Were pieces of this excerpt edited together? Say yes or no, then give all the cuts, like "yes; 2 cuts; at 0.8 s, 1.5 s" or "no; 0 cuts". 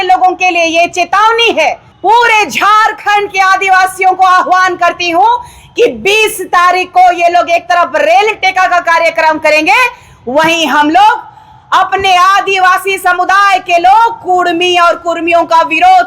yes; 1 cut; at 1.9 s